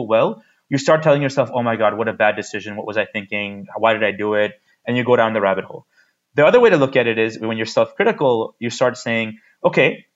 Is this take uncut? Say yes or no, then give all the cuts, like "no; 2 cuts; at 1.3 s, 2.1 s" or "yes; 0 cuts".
yes; 0 cuts